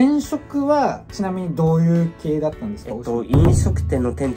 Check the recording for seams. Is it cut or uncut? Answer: uncut